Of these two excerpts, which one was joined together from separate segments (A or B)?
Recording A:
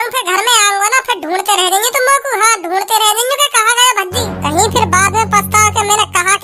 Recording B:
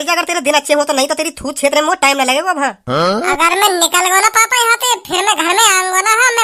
A